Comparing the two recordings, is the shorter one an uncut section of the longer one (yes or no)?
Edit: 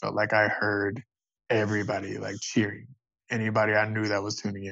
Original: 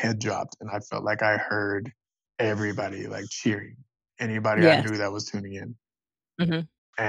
yes